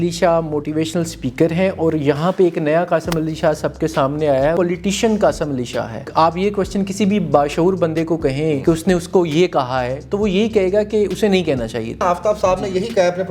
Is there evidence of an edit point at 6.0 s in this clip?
yes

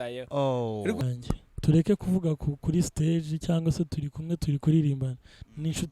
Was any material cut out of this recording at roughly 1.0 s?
yes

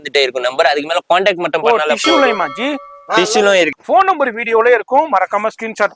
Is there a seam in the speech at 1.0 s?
no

